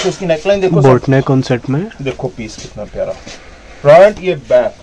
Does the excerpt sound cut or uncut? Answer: uncut